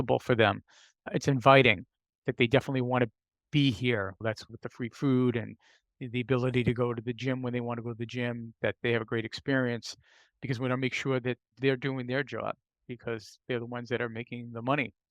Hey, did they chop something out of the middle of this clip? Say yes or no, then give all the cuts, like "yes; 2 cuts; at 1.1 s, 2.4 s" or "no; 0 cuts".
yes; 4 cuts; at 1.1 s, 4.4 s, 11.5 s, 13.3 s